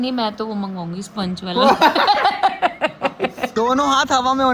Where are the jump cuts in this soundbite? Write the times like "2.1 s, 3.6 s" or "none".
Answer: 3.5 s